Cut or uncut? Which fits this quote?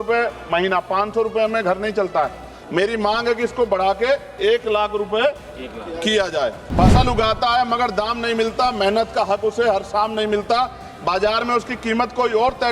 cut